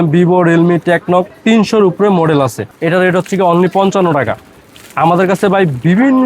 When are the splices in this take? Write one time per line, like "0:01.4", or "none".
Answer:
0:02.7